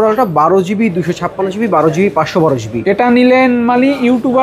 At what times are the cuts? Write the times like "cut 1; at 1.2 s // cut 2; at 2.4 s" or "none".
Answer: none